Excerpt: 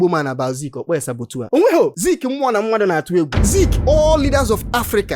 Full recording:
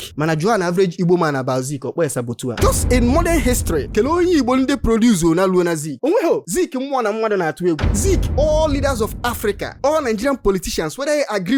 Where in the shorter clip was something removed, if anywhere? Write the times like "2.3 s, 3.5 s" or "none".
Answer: 1.4 s